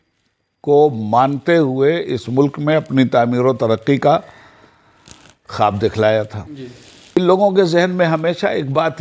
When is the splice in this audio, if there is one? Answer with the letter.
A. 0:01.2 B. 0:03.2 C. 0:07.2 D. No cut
C